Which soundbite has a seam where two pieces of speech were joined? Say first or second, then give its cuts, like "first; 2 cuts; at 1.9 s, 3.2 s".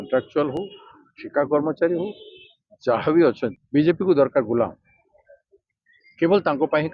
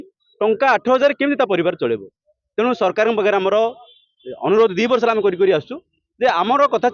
first; 1 cut; at 3.5 s